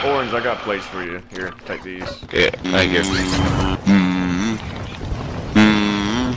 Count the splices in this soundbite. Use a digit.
2